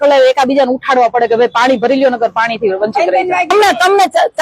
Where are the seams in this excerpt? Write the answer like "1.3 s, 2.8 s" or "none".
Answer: 3.5 s